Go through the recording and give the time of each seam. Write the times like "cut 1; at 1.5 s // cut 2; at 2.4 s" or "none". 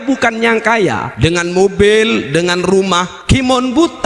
cut 1; at 1.1 s // cut 2; at 3.1 s